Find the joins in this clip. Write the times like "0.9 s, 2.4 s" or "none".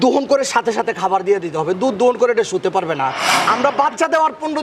3.3 s